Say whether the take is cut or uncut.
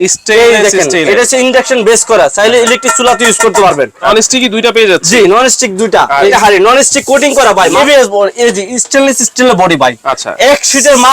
cut